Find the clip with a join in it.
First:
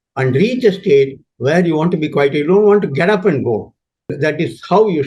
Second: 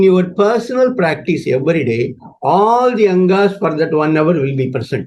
first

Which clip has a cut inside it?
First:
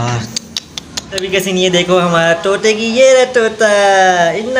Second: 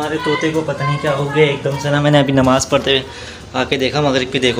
first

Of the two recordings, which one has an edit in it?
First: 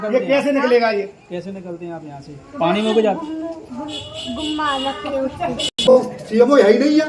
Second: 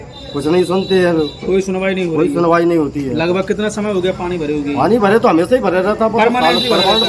first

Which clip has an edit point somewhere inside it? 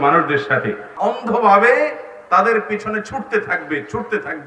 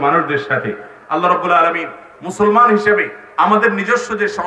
first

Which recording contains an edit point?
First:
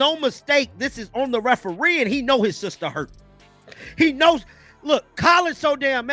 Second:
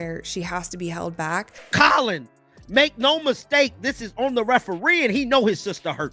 second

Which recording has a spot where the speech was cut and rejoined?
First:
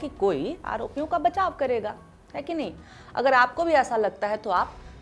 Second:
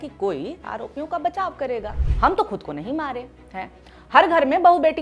second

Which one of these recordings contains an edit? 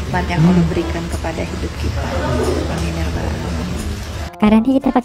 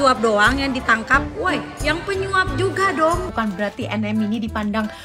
second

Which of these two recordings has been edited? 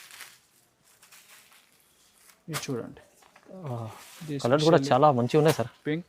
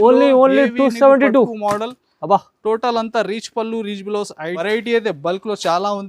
second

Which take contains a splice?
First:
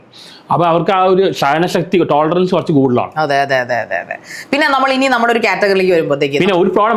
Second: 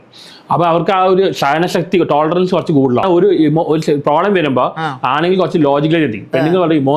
second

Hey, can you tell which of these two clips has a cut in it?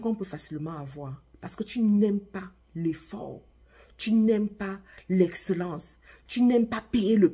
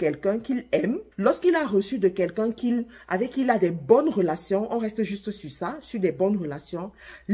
second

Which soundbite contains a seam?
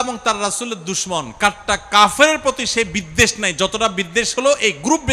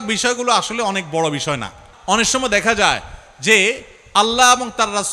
second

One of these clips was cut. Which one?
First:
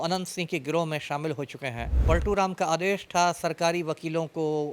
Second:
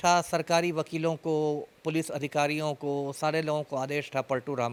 first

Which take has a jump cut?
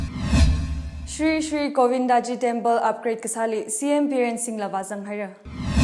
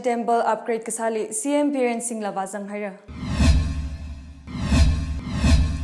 first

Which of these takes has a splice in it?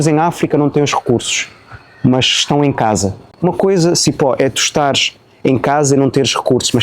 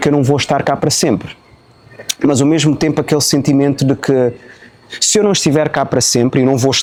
first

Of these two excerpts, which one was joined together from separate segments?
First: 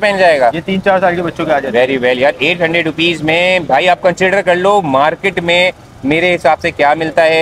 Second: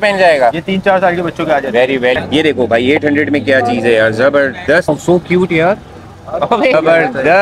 second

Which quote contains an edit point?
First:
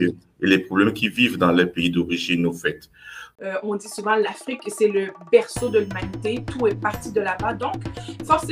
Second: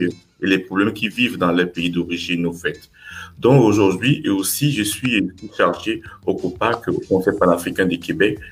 first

